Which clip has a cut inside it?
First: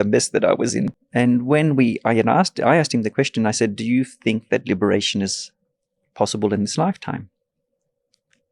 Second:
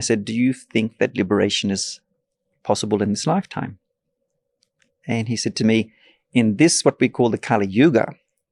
first; 1 cut; at 1.0 s

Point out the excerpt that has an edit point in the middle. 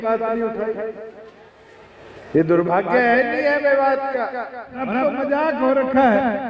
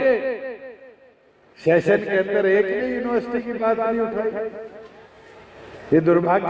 first; 1 cut; at 4.9 s

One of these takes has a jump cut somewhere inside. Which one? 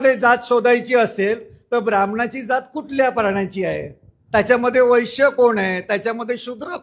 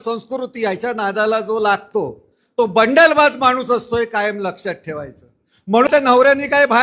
second; 1 cut; at 5.9 s

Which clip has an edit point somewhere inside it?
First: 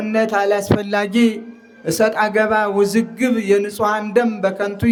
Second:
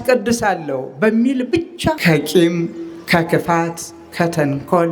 second; 1 cut; at 2.0 s

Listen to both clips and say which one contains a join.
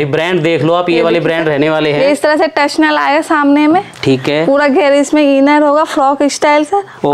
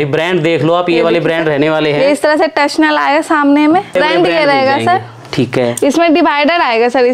second; 1 cut; at 3.9 s

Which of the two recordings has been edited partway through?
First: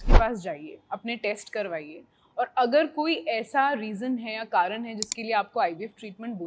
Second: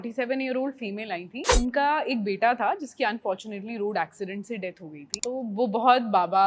second; 2 cuts; at 1.5 s, 5.1 s

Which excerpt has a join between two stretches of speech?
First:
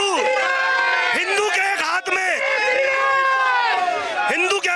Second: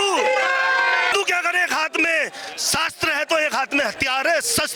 second; 1 cut; at 1.1 s

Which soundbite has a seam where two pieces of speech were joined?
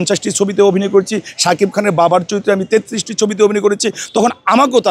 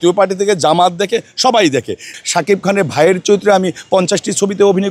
second; 1 cut; at 2.1 s

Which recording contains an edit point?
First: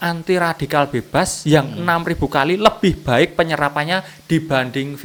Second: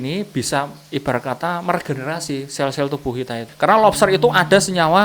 second; 1 cut; at 3.5 s

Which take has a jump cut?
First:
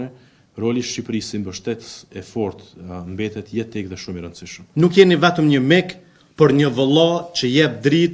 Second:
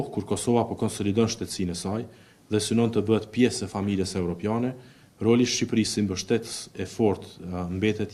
first; 1 cut; at 4.6 s

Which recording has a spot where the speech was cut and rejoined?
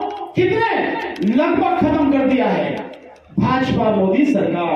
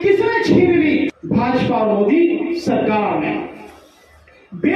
second; 1 cut; at 1.2 s

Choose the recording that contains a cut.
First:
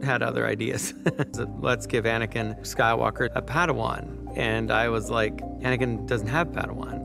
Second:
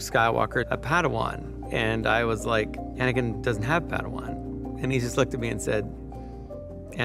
first; 1 cut; at 1.3 s

